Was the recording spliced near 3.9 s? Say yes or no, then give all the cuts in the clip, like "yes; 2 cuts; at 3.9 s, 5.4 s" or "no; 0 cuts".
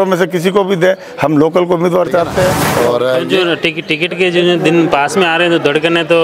no; 1 cut; at 2.6 s